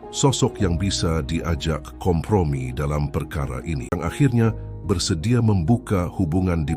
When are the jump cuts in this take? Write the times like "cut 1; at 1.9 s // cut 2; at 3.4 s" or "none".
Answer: cut 1; at 3.9 s